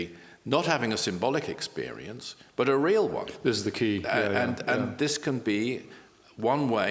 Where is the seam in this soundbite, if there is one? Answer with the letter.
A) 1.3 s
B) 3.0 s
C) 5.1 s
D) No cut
D